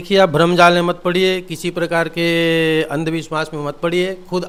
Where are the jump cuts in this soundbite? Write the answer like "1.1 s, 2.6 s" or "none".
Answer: none